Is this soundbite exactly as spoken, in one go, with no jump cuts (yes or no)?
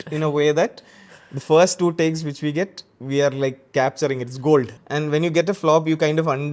no